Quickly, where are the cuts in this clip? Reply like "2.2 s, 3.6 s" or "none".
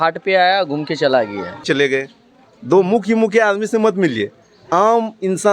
1.6 s